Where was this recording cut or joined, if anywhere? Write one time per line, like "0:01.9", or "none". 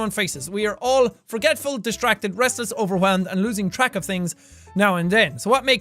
0:04.4